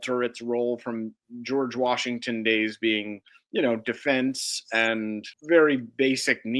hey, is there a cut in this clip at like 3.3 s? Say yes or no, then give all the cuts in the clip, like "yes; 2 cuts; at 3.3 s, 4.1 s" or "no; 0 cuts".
no; 2 cuts; at 1.1 s, 5.3 s